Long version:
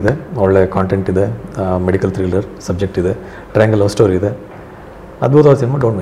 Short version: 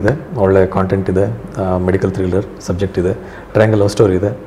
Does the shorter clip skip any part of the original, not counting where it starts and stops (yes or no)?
no